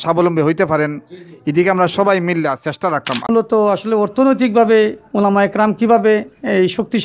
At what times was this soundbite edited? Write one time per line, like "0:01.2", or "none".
0:03.3

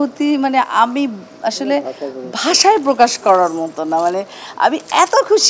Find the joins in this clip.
none

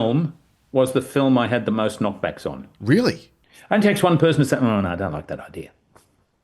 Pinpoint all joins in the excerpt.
0:03.3

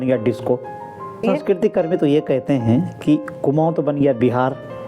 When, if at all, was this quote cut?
0:01.2

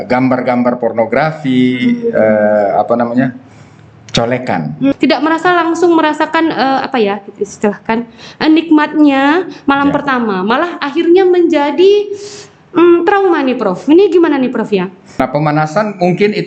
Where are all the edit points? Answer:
0:04.9
0:15.0

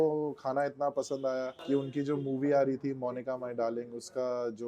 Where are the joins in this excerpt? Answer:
0:01.6

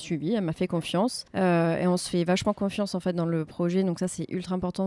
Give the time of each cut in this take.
0:01.2

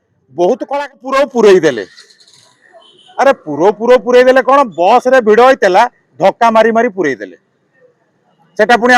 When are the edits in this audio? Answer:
0:00.9

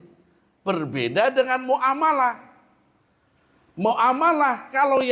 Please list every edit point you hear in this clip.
none

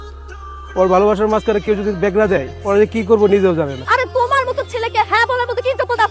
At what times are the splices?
0:03.8

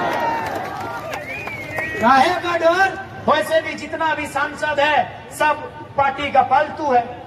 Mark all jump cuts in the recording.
0:03.1

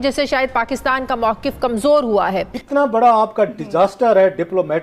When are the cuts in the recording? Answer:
0:02.6

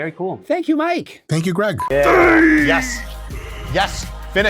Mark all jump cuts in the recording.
0:01.9

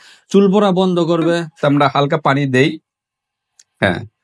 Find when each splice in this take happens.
0:01.5

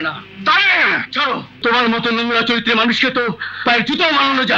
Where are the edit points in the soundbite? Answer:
0:01.6

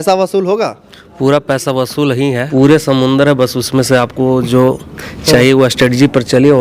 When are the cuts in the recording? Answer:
0:02.4

